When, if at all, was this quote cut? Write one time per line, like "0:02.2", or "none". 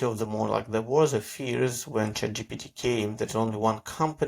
none